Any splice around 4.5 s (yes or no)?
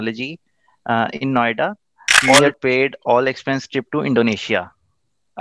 no